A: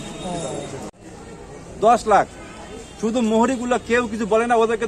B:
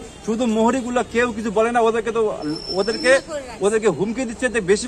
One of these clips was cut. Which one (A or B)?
A